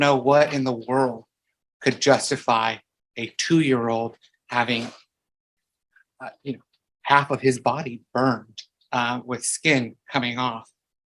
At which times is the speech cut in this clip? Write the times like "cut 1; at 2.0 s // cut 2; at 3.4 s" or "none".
none